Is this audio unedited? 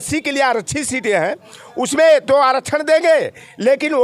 yes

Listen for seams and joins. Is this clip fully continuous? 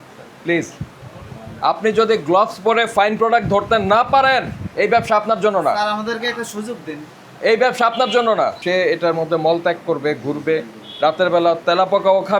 no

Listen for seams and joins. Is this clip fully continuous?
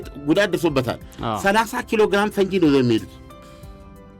yes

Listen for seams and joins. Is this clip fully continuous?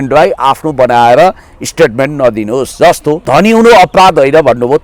no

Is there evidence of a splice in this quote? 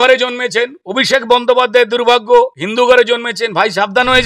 no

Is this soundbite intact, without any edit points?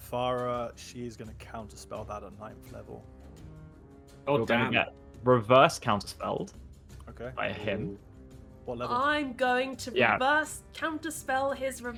yes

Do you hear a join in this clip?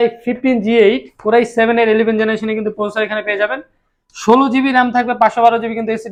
no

